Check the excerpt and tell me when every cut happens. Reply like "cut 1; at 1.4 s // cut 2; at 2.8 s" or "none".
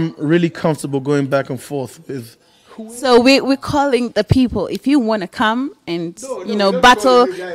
none